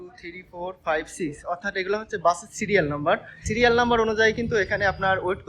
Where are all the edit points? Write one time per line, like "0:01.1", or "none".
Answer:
0:03.4

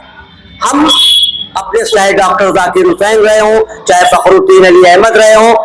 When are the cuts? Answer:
0:01.9

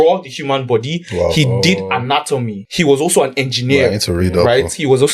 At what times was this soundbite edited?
0:02.6

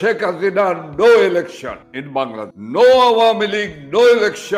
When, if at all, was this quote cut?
0:02.3

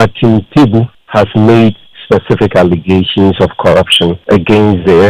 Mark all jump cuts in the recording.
0:01.0
0:04.2

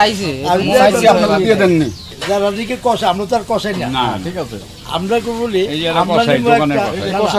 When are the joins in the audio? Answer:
0:02.2

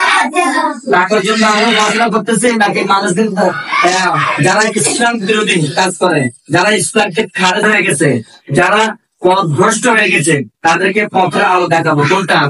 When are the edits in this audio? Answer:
none

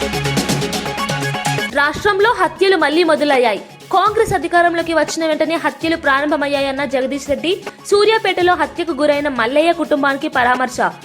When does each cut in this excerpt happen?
0:01.6

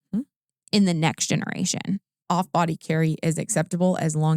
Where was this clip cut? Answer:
0:02.1

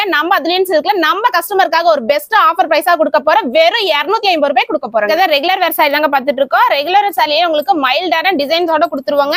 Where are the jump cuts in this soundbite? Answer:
none

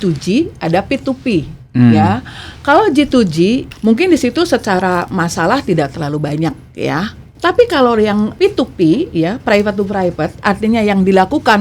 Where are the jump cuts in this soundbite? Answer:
0:07.2
0:08.3

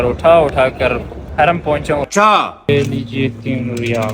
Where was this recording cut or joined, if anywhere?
0:02.7

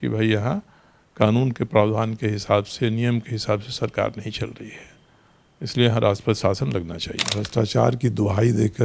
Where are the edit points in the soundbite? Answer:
0:07.4

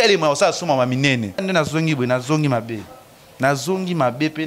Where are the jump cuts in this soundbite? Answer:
0:01.4

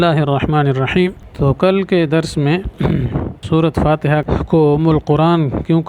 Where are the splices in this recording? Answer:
0:01.2
0:03.4
0:04.3

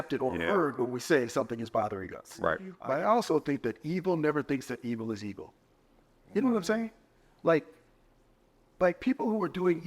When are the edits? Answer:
0:02.7

